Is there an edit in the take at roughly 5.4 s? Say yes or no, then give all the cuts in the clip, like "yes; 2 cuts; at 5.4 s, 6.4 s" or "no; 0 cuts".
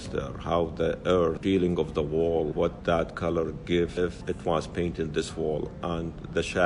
no; 3 cuts; at 1.4 s, 2.7 s, 4.1 s